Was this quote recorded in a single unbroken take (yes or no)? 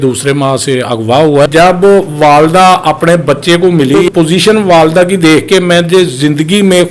no